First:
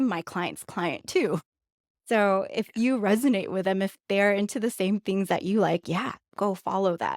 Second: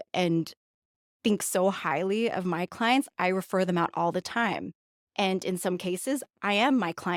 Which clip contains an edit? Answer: first; 1 cut; at 6.3 s

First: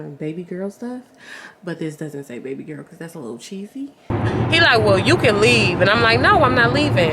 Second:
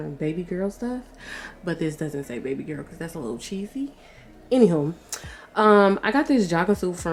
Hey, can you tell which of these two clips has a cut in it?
first; 1 cut; at 4.1 s

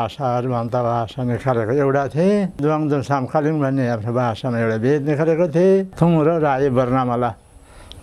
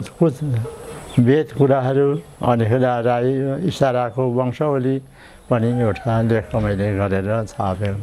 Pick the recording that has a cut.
first; 2 cuts; at 2.6 s, 5.9 s

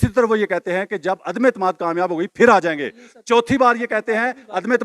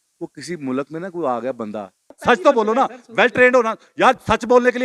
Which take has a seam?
second; 1 cut; at 2.1 s

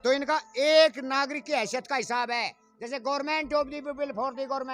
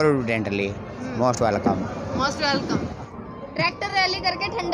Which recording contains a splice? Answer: second; 1 cut; at 3.2 s

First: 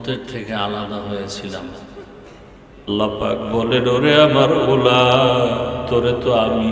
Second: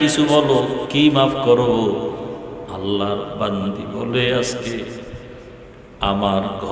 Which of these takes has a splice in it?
first; 1 cut; at 2.9 s

